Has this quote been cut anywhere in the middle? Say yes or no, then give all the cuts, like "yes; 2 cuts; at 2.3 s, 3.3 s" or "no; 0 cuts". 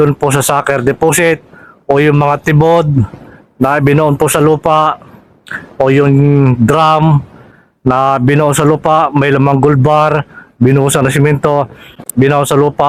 no; 0 cuts